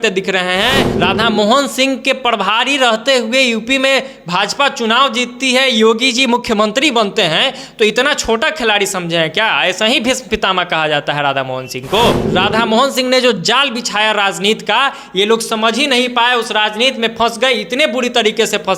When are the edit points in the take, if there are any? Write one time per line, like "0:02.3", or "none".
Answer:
0:00.9
0:12.2

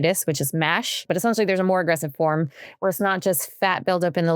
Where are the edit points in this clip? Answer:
0:01.0

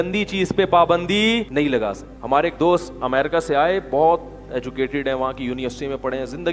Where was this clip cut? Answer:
0:01.7

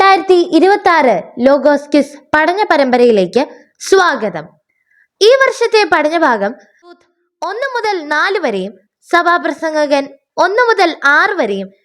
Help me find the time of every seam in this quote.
0:07.0

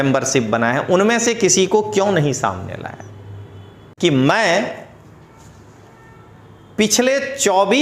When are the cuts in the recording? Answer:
0:03.8

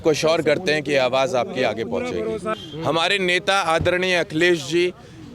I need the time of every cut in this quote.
0:02.5

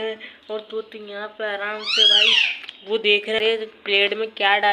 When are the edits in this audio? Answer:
0:03.4

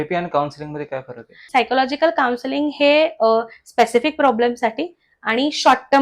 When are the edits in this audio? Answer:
0:01.4

